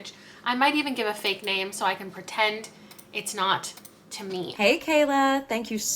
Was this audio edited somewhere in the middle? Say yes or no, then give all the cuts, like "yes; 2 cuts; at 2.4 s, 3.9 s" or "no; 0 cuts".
yes; 1 cut; at 4.5 s